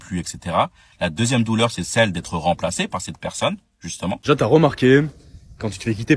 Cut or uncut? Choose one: cut